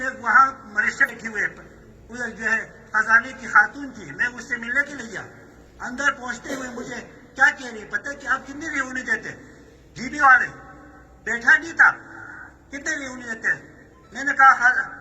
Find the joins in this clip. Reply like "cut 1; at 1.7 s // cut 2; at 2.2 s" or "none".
cut 1; at 1.0 s